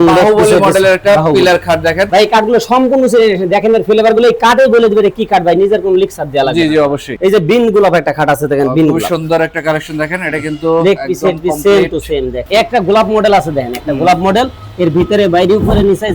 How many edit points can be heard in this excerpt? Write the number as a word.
three